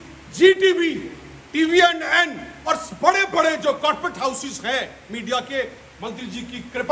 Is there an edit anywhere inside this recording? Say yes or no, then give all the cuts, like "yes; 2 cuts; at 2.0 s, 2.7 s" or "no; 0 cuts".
no; 0 cuts